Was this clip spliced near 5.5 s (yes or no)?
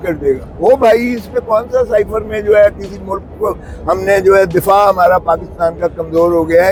no